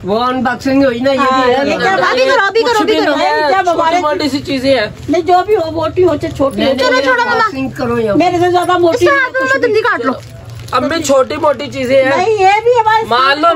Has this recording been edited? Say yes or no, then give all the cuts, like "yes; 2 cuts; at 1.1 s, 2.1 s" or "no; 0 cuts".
no; 0 cuts